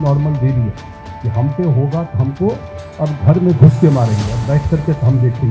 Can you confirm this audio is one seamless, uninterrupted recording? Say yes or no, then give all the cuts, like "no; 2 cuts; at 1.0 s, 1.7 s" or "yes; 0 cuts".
yes; 0 cuts